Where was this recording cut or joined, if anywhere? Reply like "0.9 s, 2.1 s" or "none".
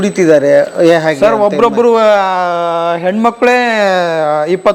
none